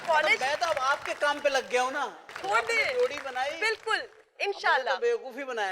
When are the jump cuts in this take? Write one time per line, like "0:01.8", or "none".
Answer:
0:02.3